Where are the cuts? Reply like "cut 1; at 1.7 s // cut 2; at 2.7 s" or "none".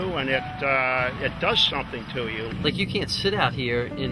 cut 1; at 2.5 s